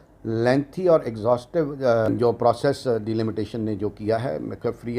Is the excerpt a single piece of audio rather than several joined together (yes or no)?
no